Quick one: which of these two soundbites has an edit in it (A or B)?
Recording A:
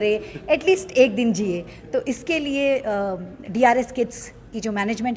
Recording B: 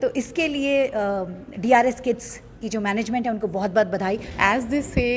B